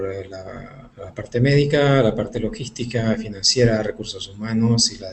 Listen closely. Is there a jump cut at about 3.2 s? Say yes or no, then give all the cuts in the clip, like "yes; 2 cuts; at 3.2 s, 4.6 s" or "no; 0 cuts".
no; 1 cut; at 1.4 s